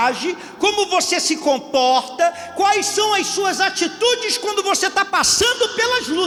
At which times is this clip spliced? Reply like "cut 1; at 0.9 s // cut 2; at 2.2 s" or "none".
none